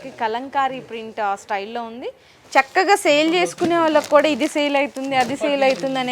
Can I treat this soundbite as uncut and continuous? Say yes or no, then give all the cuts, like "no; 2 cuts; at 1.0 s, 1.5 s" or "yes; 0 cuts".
no; 1 cut; at 2.3 s